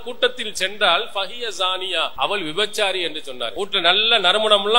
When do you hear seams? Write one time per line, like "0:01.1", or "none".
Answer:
0:02.1
0:03.5